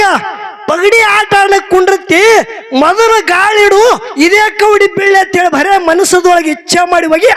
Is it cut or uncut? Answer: uncut